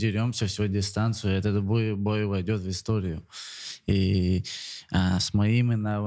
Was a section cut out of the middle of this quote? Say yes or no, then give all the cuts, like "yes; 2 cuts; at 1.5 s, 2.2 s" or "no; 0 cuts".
no; 0 cuts